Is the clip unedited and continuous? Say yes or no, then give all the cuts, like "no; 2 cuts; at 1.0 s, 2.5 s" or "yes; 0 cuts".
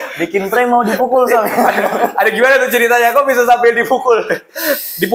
yes; 0 cuts